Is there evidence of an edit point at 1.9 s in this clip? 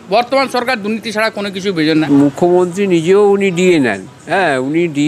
yes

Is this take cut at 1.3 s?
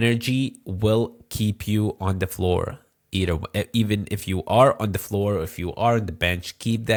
no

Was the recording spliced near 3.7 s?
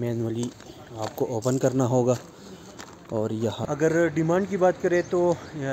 yes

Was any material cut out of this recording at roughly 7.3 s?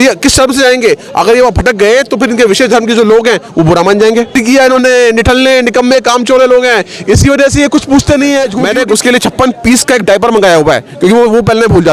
no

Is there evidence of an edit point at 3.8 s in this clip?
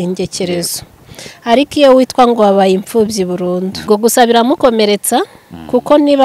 yes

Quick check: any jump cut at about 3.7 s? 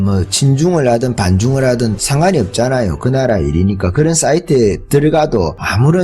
no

